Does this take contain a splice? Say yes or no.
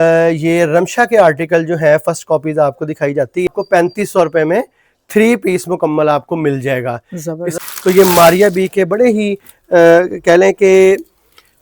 yes